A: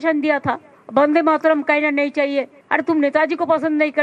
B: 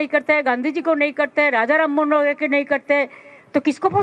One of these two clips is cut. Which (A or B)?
A